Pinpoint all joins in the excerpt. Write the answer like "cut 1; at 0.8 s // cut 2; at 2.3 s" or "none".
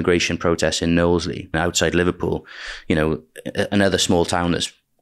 cut 1; at 1.5 s